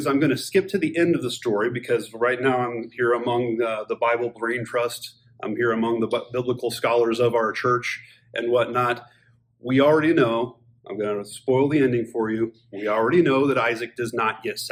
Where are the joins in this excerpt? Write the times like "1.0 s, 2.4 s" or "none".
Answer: none